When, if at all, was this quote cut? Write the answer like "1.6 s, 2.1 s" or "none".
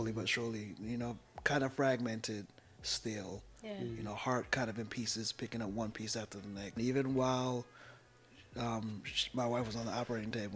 6.7 s